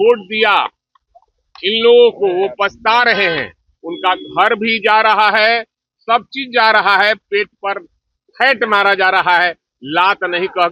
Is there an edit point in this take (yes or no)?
no